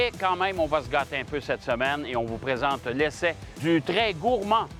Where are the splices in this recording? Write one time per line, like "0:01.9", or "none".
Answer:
none